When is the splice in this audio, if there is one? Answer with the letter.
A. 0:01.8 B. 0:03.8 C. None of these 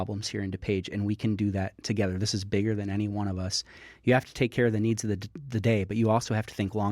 B